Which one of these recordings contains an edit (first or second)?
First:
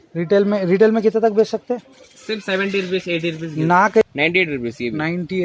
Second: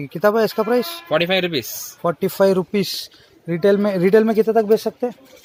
first